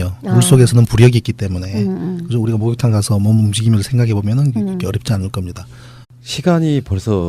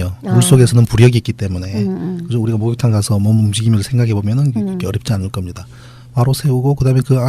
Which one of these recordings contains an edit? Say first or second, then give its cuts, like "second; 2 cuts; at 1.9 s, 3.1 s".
second; 1 cut; at 6.0 s